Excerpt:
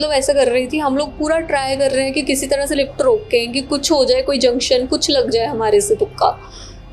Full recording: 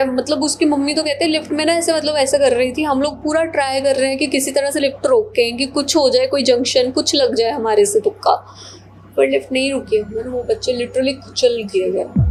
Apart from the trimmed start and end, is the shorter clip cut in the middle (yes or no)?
no